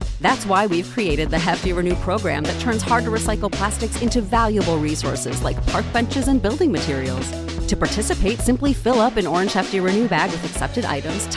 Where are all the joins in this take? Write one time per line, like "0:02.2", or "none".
none